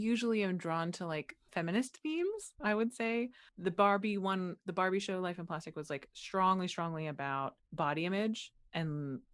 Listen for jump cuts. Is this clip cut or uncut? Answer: cut